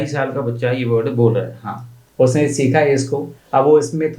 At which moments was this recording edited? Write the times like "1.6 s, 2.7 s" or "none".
none